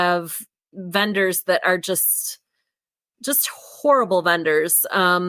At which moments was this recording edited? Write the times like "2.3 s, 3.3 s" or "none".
none